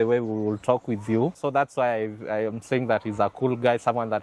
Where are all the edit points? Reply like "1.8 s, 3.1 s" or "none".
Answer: 1.4 s

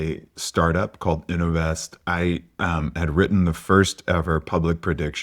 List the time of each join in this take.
none

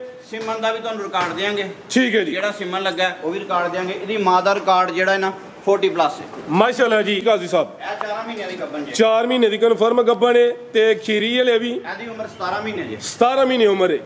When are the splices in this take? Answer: 7.2 s

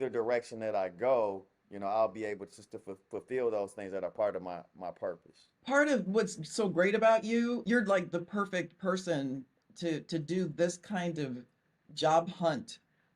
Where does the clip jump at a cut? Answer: 7.6 s

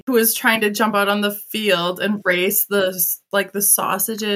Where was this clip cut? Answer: none

